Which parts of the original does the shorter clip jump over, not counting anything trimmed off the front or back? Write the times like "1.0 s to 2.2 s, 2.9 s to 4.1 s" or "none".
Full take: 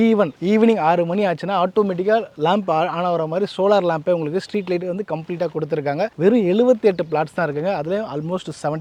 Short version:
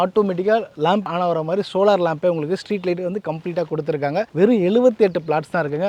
2.7 s to 2.9 s

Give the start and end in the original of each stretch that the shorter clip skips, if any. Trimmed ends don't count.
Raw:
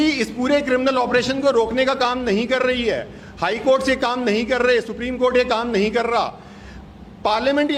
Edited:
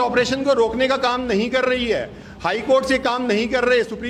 none

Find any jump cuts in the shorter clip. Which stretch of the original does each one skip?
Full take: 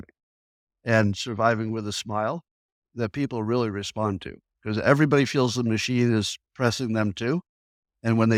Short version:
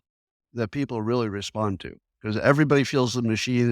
none

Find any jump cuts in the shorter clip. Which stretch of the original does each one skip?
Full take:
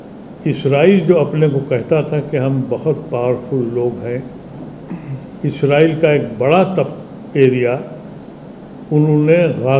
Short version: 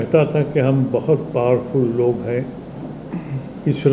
none

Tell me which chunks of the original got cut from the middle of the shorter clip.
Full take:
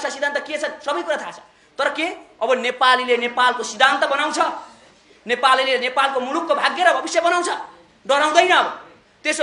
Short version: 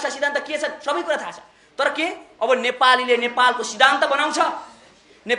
none

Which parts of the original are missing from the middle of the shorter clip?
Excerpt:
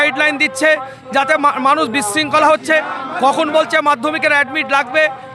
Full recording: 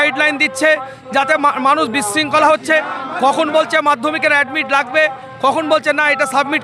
none

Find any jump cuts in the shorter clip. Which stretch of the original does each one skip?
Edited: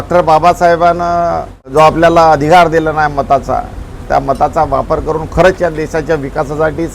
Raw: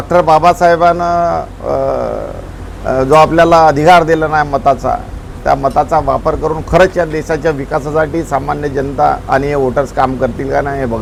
1.7 s to 3.0 s

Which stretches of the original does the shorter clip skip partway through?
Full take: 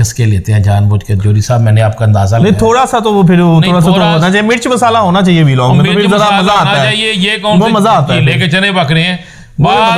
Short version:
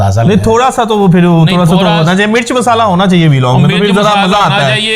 none

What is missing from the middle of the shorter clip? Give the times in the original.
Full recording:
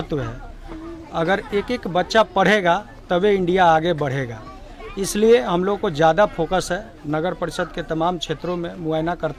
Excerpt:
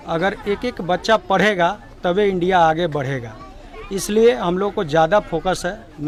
none

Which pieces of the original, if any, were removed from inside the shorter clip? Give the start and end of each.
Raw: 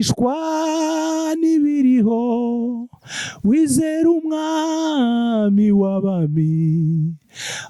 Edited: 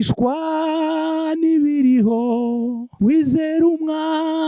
2.8 s to 3.3 s

